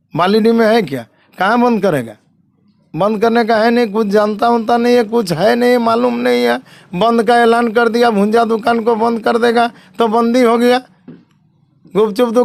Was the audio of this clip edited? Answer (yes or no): no